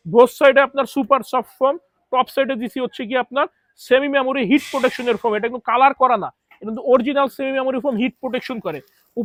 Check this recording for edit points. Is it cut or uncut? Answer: uncut